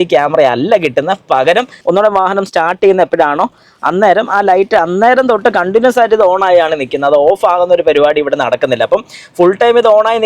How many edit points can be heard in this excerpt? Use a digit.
1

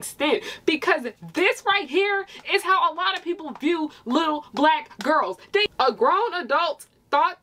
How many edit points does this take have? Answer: 1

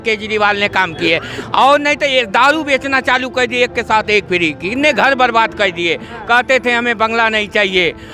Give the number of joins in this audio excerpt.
0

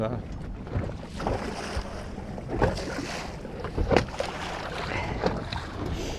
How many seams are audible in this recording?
1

